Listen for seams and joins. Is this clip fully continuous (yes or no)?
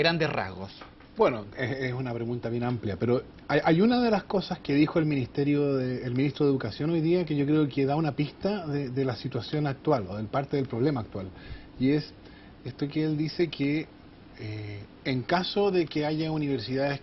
no